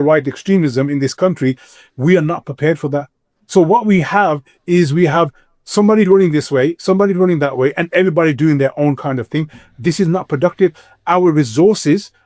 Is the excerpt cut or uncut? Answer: uncut